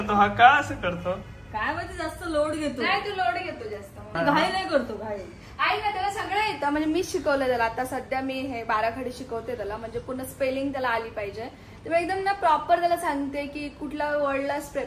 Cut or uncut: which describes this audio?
uncut